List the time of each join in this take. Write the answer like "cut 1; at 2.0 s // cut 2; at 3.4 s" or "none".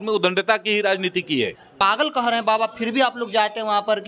cut 1; at 1.8 s